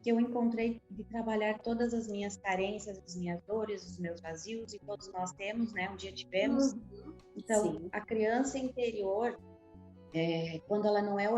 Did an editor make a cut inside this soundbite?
no; 0 cuts

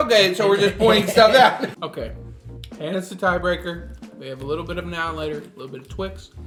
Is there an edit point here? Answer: no; 0 cuts

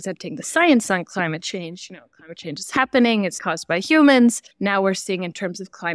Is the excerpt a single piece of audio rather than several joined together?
no; 2 cuts; at 3.5 s, 4.5 s

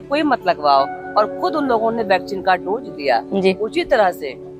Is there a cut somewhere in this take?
no; 0 cuts

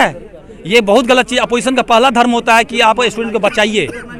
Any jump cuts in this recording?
no; 0 cuts

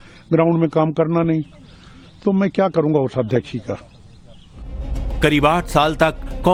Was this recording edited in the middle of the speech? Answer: no; 0 cuts

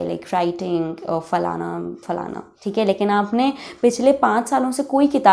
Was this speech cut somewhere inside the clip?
yes; 1 cut; at 2.4 s

